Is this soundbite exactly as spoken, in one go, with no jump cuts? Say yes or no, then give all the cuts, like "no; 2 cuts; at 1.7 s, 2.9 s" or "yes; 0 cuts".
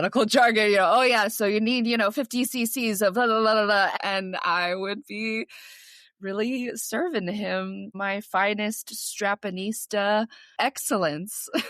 no; 2 cuts; at 3.9 s, 10.4 s